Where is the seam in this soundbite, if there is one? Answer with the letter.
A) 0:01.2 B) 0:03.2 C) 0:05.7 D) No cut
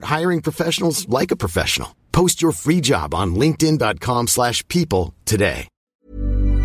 C